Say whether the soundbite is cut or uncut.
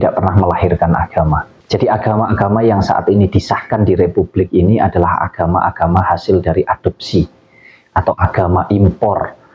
cut